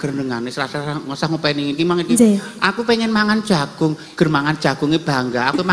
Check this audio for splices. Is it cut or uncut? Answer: uncut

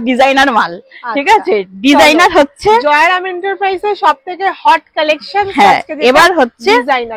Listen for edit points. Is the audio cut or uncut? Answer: uncut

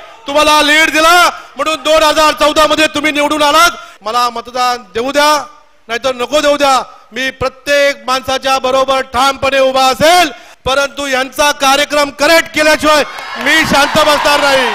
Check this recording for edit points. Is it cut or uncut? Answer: cut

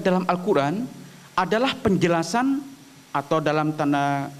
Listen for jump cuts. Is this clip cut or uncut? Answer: uncut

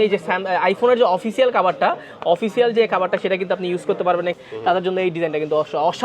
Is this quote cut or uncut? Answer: cut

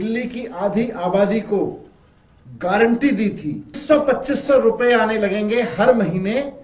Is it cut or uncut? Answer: cut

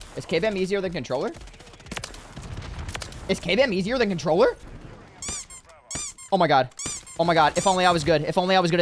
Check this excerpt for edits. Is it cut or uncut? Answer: cut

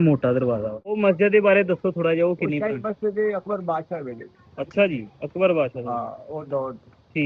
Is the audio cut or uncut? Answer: cut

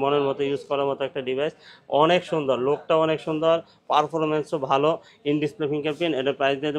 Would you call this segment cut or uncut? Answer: uncut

